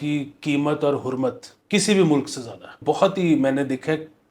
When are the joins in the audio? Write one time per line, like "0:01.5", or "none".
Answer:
0:01.5
0:02.8